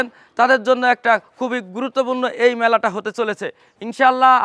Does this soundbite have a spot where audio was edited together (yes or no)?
no